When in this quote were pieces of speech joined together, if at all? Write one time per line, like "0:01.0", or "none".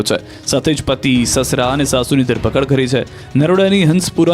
0:01.9